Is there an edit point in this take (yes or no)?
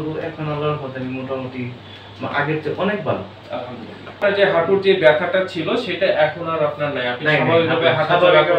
yes